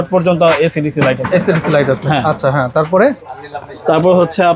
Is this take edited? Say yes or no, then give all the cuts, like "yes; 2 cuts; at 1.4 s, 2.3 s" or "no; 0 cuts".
no; 0 cuts